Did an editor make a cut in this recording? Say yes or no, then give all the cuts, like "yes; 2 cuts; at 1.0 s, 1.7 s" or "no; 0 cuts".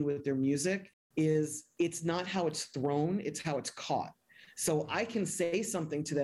yes; 2 cuts; at 0.9 s, 1.6 s